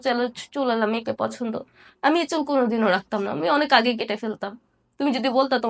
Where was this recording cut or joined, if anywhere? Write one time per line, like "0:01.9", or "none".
none